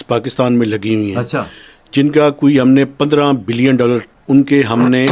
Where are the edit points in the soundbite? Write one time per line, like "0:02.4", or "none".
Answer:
0:04.2